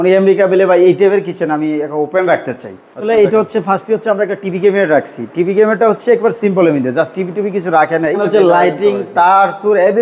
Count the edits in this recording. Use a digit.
2